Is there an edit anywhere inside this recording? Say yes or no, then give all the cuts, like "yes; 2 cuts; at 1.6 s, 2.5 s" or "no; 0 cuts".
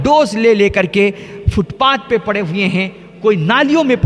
no; 0 cuts